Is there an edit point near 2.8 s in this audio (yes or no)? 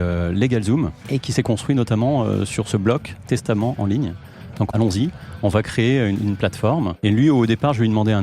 no